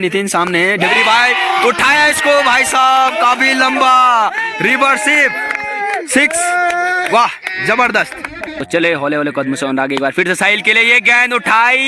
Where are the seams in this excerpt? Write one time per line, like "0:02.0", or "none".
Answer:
0:08.6